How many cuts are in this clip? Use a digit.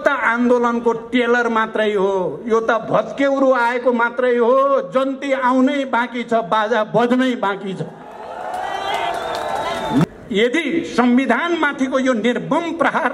1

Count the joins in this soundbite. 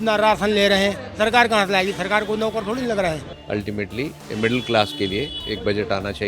1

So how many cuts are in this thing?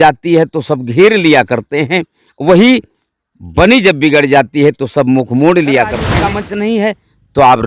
1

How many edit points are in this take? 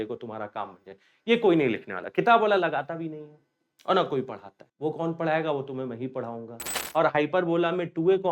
1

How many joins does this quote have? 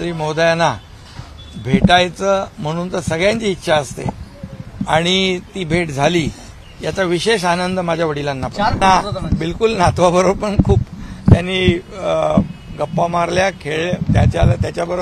1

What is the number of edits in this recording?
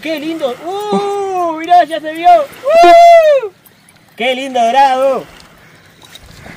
1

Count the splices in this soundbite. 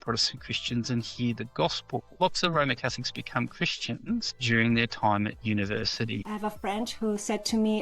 3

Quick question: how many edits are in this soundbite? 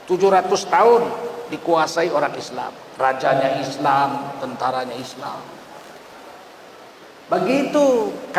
1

